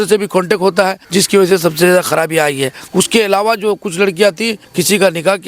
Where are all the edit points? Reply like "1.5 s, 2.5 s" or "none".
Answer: 1.0 s, 2.8 s, 4.6 s